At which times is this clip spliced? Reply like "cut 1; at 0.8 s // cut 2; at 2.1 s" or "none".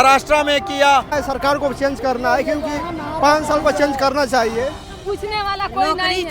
cut 1; at 1.1 s // cut 2; at 4.9 s